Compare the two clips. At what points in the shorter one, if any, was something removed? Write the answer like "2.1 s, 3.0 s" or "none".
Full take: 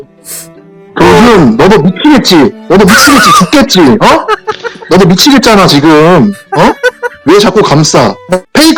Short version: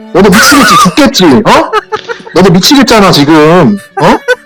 none